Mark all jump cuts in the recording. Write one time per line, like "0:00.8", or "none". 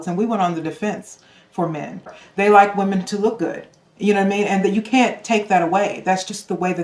0:02.1